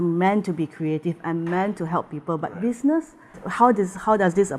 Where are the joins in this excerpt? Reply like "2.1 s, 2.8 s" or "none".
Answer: 3.4 s